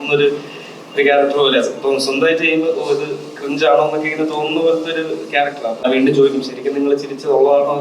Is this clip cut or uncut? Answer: cut